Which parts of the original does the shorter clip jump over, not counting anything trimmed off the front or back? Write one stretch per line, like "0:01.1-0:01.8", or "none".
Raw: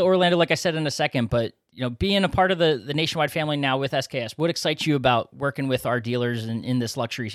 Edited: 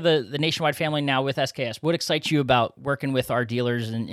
none